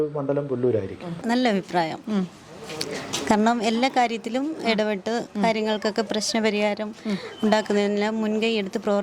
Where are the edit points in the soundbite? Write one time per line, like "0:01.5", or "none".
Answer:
0:01.2